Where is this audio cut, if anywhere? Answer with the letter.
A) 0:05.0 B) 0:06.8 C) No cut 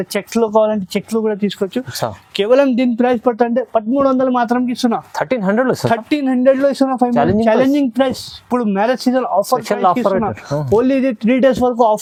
C